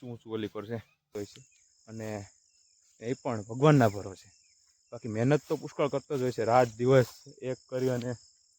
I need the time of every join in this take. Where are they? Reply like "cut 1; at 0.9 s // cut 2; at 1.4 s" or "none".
cut 1; at 1.1 s

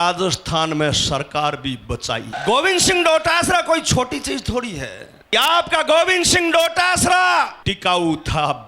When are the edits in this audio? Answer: cut 1; at 2.4 s // cut 2; at 5.3 s // cut 3; at 7.6 s

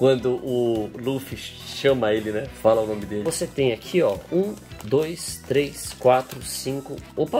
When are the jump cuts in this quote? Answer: cut 1; at 3.2 s

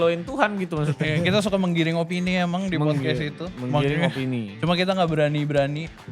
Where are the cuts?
none

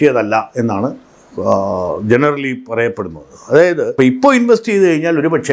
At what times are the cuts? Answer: cut 1; at 3.9 s

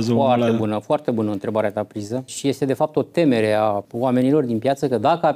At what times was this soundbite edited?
cut 1; at 2.3 s // cut 2; at 3.9 s

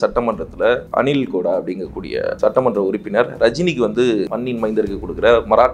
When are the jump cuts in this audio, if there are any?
cut 1; at 0.9 s // cut 2; at 2.4 s // cut 3; at 4.3 s

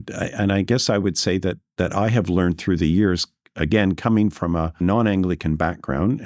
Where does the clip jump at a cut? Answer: cut 1; at 4.8 s

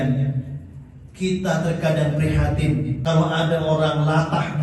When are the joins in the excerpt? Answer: cut 1; at 2.9 s

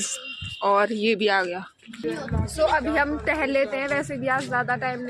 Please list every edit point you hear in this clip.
none

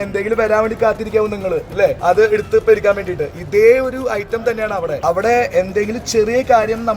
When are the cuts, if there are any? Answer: cut 1; at 2.0 s // cut 2; at 5.0 s

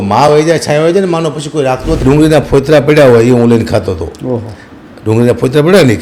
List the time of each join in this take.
cut 1; at 2.0 s

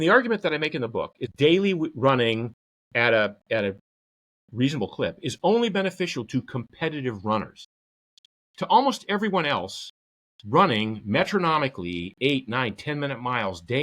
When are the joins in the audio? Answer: cut 1; at 1.3 s

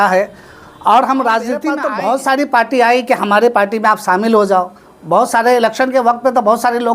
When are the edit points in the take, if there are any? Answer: cut 1; at 1.8 s

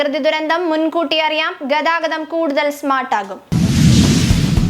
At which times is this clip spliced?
cut 1; at 3.4 s

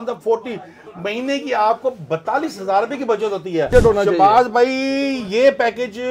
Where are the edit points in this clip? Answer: cut 1; at 3.7 s

